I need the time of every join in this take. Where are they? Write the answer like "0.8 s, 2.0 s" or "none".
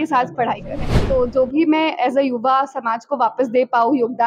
0.9 s